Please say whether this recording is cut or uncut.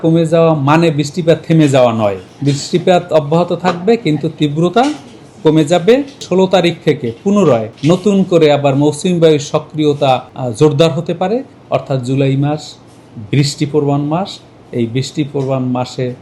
cut